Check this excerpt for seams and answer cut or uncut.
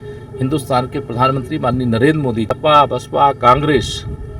cut